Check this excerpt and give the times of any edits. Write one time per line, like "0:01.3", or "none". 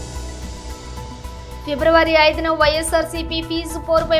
0:01.1